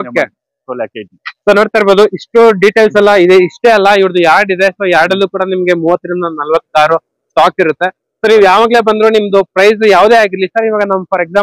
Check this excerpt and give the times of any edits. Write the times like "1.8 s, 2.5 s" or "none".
none